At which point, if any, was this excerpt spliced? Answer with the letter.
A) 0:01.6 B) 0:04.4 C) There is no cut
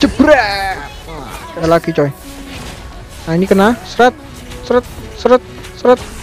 A